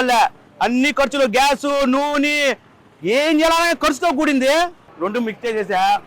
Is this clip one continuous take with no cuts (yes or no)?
no